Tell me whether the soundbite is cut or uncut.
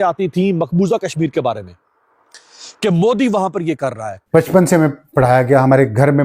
cut